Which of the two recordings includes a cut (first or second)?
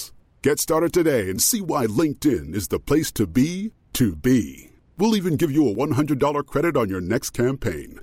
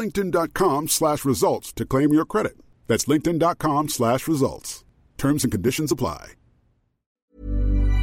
second